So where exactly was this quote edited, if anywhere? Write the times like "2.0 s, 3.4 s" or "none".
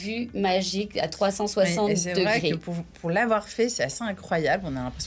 none